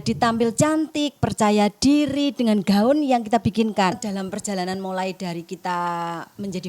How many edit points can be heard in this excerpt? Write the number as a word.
one